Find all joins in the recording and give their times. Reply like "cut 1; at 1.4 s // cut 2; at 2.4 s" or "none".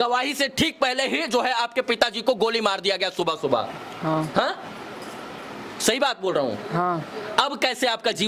none